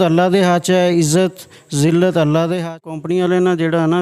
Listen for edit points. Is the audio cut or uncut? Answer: cut